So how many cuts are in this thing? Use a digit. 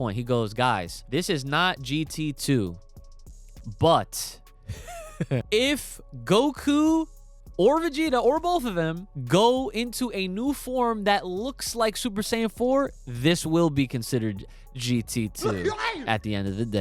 3